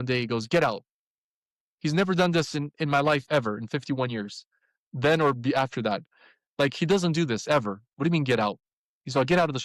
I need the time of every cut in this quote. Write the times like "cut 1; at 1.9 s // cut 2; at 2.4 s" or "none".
none